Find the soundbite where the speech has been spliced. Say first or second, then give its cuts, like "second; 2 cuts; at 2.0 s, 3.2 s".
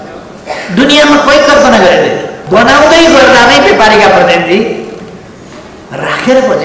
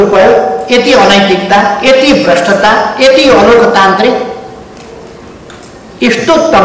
first; 1 cut; at 2.4 s